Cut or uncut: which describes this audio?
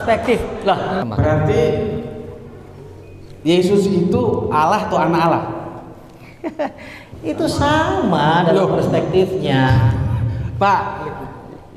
cut